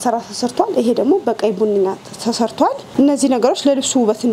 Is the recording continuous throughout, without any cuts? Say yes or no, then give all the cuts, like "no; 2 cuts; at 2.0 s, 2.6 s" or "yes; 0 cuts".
no; 1 cut; at 2.9 s